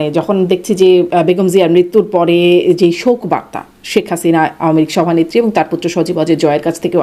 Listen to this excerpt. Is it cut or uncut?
uncut